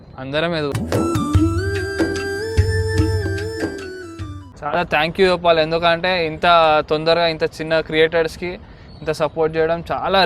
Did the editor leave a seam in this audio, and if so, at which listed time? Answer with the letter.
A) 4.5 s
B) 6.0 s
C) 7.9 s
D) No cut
A